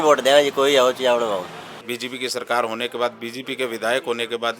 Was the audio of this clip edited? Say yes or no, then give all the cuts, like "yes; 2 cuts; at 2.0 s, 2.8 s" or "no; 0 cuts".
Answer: yes; 1 cut; at 1.5 s